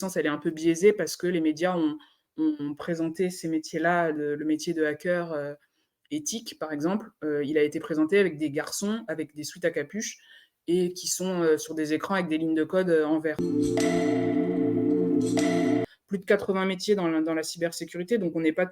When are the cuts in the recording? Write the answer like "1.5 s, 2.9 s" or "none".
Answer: 13.4 s, 15.8 s